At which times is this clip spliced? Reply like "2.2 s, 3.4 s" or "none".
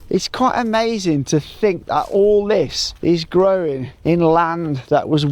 2.8 s, 3.9 s